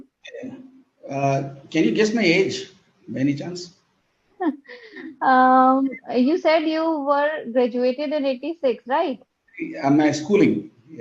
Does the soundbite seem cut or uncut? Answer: cut